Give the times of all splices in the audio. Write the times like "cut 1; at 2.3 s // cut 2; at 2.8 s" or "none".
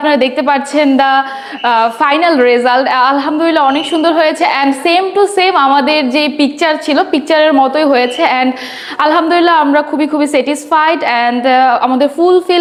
none

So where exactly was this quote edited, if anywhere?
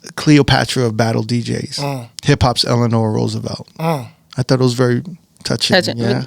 cut 1; at 2.1 s

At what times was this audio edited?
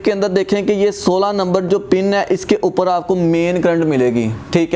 none

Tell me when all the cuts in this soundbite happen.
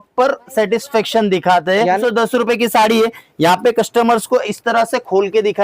cut 1; at 2.0 s

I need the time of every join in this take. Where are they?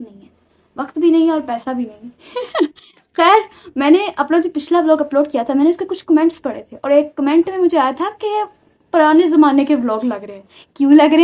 none

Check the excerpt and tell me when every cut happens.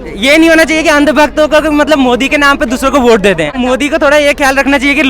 cut 1; at 3.5 s

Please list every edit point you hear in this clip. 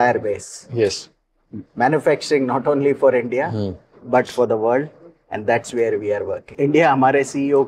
cut 1; at 6.5 s

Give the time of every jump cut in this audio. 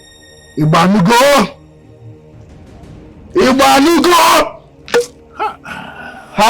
cut 1; at 1.8 s // cut 2; at 3.3 s

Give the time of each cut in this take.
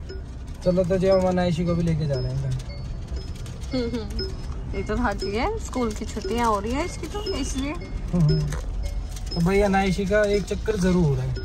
none

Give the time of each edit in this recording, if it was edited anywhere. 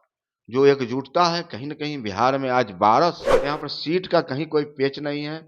cut 1; at 3.3 s

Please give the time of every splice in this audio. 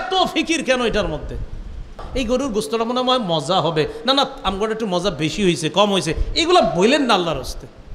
cut 1; at 2.0 s

